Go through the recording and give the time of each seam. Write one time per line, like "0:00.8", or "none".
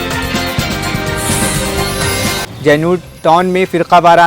0:02.5